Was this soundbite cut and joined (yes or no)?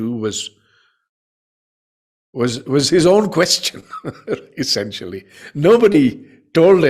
no